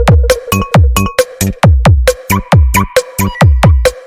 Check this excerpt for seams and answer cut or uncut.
cut